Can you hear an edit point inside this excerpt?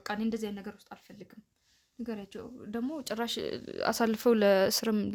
no; 0 cuts

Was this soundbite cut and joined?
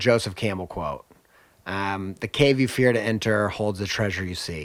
no; 0 cuts

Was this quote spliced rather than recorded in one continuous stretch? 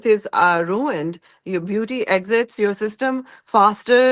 no; 0 cuts

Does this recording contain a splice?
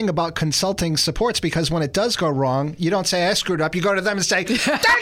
no; 0 cuts

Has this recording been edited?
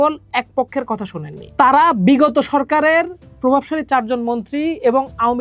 no; 0 cuts

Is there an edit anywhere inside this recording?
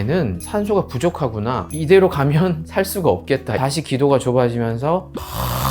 yes; 1 cut; at 3.5 s

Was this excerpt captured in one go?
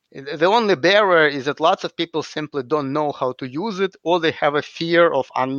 yes; 0 cuts

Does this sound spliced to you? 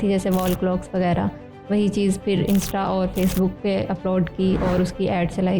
no; 0 cuts

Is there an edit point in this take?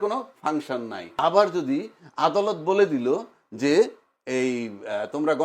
yes; 1 cut; at 1.0 s

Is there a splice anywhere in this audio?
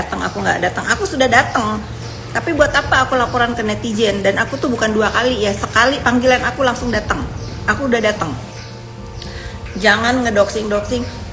no; 0 cuts

